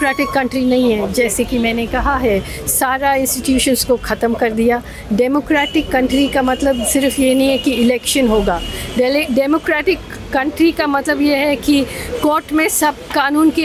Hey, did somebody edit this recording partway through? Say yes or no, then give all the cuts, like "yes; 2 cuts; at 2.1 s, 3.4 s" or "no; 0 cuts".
no; 0 cuts